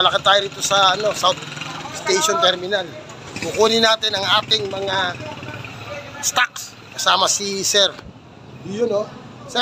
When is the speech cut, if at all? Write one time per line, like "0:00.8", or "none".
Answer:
none